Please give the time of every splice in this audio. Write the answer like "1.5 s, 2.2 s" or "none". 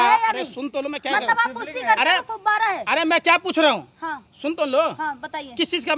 none